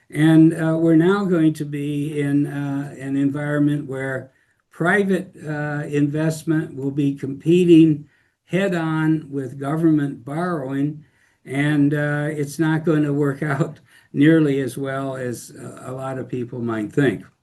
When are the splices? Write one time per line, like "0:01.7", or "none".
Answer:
none